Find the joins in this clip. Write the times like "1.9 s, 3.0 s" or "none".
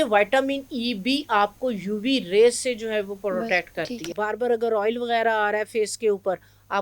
4.1 s